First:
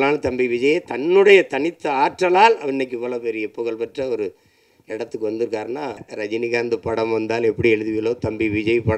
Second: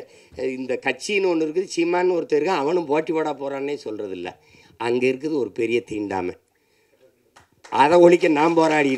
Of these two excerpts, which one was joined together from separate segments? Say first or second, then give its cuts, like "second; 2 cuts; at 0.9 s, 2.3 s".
first; 1 cut; at 6.1 s